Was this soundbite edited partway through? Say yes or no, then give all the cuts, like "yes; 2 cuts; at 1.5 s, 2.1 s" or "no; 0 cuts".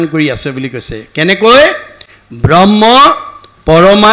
no; 0 cuts